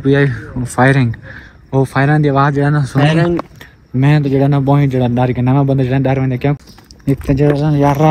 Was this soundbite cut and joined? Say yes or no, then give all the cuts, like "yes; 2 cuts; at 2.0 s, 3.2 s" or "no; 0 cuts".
yes; 1 cut; at 6.6 s